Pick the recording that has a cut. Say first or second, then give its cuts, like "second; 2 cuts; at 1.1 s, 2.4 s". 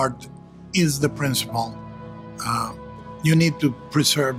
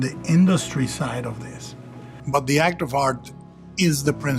second; 1 cut; at 2.1 s